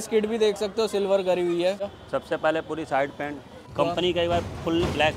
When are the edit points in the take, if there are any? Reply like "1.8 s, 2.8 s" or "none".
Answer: 2.0 s, 3.6 s